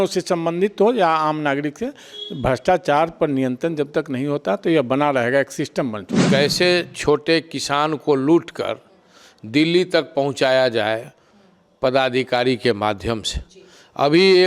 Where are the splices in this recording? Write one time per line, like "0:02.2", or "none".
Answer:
0:06.1